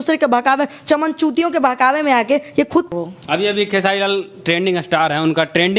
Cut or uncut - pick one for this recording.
cut